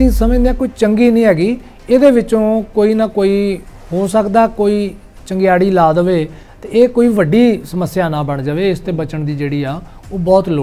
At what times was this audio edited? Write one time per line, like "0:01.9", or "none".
none